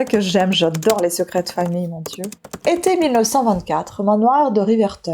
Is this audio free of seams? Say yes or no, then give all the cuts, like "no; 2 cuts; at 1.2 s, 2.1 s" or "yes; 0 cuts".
no; 1 cut; at 2.4 s